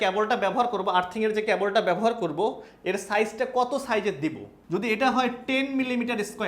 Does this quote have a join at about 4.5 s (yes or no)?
yes